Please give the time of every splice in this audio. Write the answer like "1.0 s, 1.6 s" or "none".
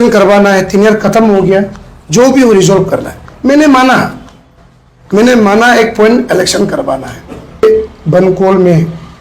7.6 s